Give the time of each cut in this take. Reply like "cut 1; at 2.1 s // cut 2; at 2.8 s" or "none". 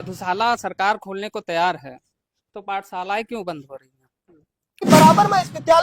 cut 1; at 4.9 s